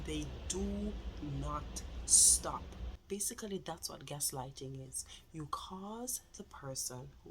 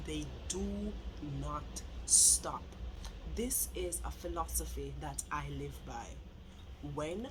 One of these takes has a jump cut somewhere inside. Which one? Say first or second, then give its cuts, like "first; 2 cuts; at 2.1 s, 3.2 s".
first; 1 cut; at 2.9 s